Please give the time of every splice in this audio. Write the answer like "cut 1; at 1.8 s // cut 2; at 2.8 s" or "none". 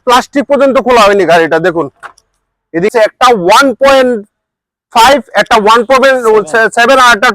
cut 1; at 2.9 s

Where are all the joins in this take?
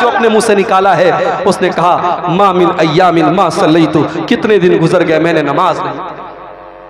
none

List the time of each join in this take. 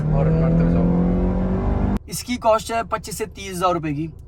cut 1; at 2.0 s

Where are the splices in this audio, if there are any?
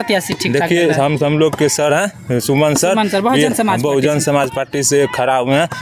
none

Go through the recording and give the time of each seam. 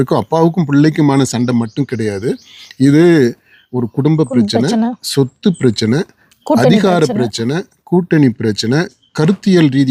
none

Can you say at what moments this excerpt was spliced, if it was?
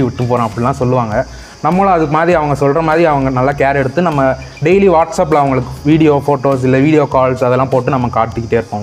none

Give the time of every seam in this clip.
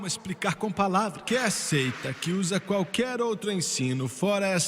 cut 1; at 1.2 s

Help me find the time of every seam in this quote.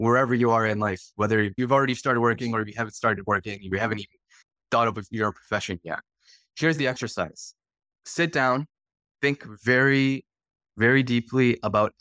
cut 1; at 1.6 s

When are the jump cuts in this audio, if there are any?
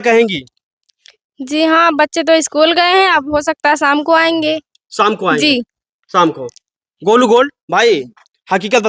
none

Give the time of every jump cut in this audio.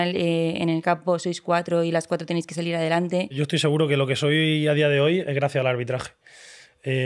cut 1; at 3.4 s

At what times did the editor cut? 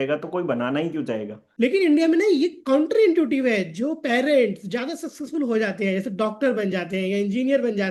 cut 1; at 1.4 s

